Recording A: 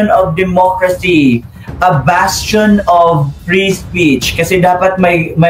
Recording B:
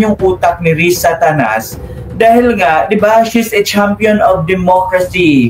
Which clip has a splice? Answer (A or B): A